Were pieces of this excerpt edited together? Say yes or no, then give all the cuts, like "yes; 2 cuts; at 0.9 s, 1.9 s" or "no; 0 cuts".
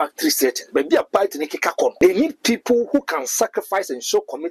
yes; 1 cut; at 2.0 s